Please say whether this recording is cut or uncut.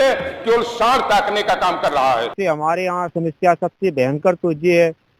cut